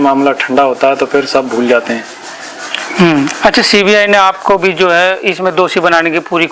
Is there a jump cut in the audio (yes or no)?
no